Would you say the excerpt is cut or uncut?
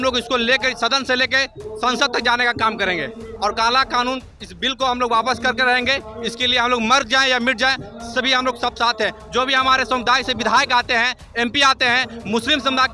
cut